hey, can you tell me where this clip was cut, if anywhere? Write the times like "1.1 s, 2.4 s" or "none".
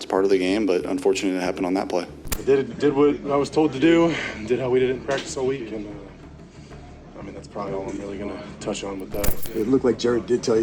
2.3 s